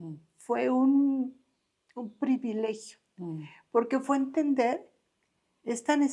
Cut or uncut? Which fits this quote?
uncut